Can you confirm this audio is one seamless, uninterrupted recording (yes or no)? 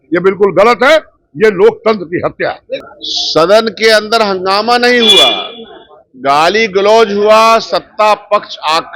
no